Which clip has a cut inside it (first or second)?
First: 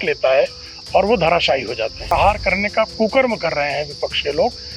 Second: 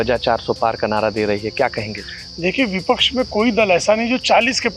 first